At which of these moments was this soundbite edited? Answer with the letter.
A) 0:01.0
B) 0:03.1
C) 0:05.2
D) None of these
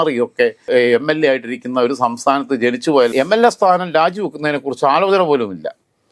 B